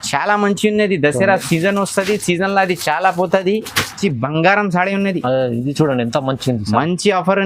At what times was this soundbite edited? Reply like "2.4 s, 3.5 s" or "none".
4.0 s